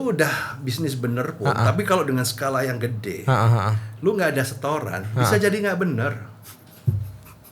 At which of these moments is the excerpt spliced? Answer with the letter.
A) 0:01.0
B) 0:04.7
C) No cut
C